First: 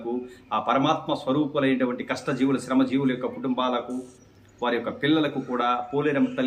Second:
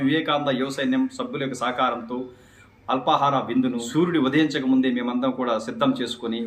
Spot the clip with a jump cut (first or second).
second